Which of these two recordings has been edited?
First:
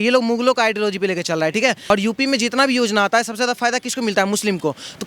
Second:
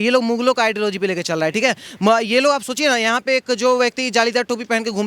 first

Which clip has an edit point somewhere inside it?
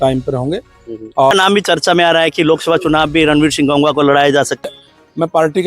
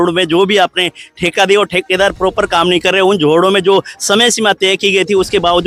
first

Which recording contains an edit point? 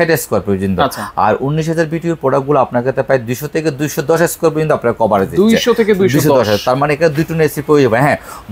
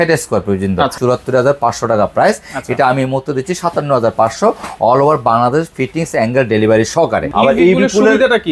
second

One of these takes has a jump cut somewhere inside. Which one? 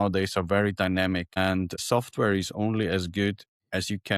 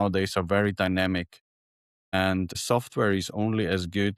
first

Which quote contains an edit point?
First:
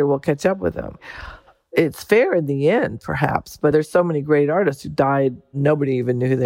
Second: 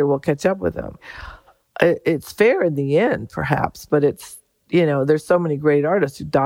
first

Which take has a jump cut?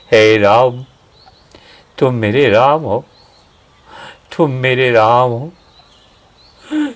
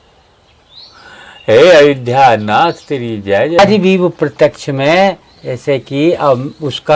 second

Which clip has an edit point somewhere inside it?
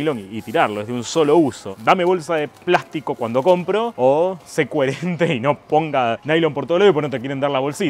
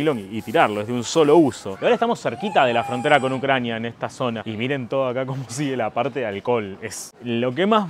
second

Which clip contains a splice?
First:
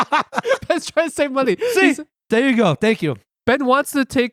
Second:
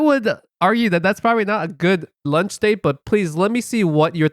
second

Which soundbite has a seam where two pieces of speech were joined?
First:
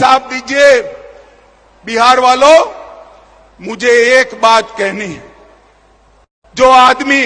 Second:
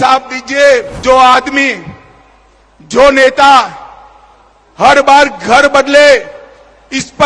second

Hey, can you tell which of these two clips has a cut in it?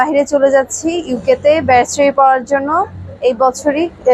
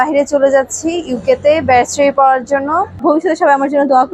second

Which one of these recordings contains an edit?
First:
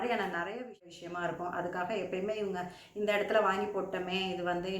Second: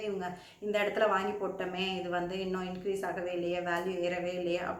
first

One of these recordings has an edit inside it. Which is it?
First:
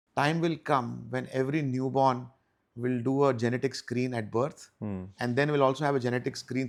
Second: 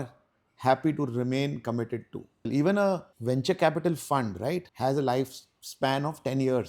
second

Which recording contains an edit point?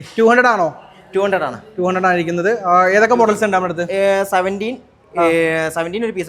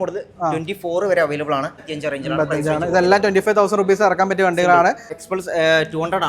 second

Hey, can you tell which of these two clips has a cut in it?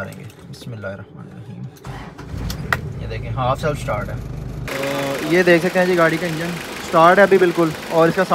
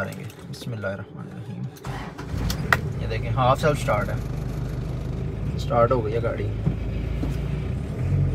first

